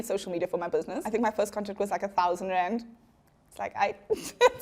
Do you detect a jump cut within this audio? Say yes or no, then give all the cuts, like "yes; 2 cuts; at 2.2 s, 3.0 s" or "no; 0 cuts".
yes; 1 cut; at 1.0 s